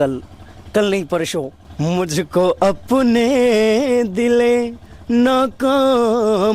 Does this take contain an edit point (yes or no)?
yes